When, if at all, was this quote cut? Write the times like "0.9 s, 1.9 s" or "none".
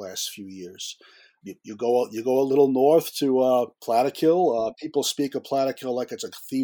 1.4 s, 3.8 s